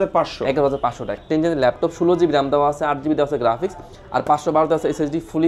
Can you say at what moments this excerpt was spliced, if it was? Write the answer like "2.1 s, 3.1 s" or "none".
1.2 s